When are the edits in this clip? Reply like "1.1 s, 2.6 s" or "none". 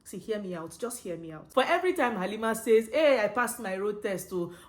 1.4 s